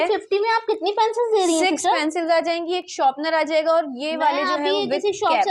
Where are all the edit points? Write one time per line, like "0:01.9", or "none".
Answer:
none